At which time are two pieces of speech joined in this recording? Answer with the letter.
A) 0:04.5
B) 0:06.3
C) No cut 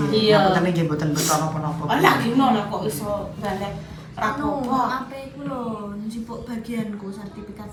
C